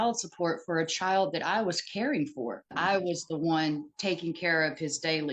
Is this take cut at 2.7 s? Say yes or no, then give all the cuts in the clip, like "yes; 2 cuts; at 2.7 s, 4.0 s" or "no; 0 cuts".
yes; 1 cut; at 2.7 s